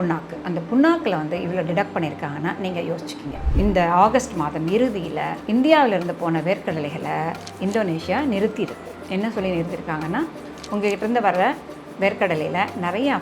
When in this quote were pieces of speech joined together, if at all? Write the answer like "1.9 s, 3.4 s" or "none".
3.4 s

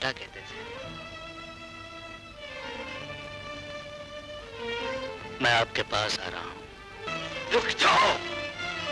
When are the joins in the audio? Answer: 7.1 s

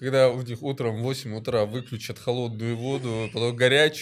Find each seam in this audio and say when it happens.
none

